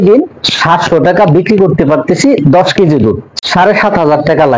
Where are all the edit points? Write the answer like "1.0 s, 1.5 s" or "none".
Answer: 3.3 s